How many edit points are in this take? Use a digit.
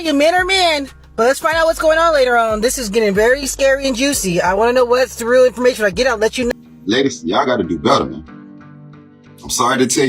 1